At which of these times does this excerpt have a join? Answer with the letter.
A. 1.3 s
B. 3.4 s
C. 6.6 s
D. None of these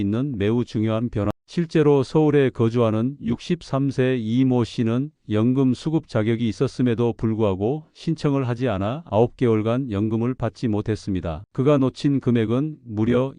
A